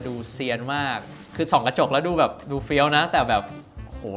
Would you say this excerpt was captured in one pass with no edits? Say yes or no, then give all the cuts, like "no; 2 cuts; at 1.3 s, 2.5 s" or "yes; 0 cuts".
no; 1 cut; at 1.2 s